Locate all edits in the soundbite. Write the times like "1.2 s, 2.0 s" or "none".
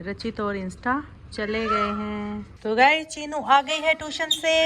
2.5 s

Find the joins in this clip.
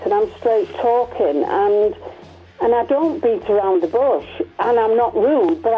none

